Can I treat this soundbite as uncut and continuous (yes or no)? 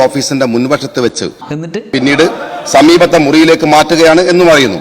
no